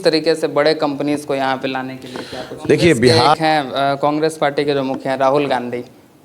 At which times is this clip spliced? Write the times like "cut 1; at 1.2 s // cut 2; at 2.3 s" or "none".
cut 1; at 3.3 s